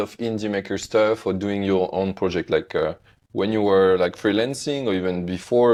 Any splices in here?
no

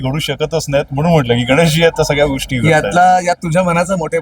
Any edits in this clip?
no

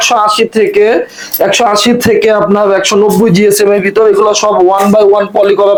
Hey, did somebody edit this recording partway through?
no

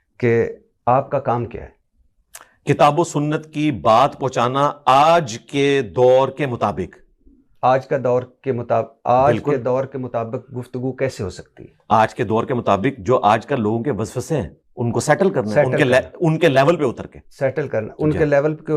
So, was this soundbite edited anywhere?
no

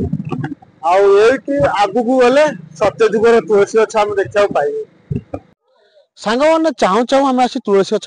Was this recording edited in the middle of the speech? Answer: yes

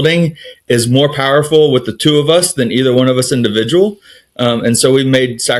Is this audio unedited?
yes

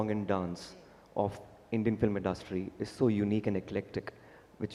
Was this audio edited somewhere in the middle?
no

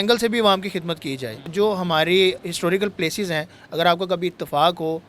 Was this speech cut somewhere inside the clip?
yes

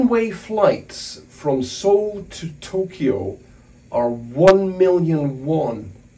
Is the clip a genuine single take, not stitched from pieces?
yes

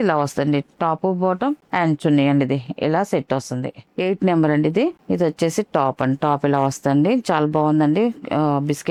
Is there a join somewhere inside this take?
no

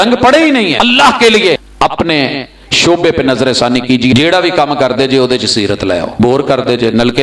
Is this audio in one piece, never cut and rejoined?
no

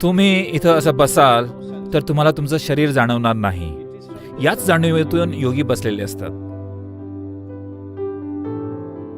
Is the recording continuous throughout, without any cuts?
no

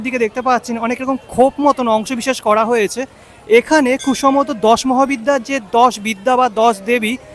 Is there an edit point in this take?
no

